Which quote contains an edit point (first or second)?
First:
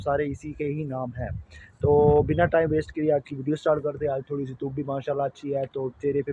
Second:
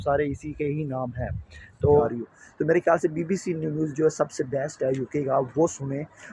second